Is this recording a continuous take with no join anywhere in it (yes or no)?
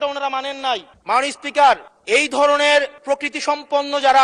no